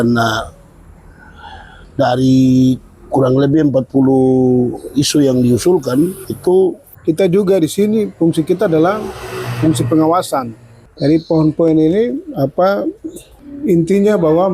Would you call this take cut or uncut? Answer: cut